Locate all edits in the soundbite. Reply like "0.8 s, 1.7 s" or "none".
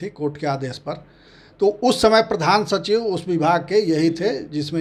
none